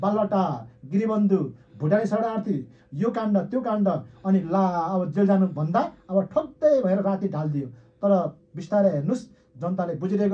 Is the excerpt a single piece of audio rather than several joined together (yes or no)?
yes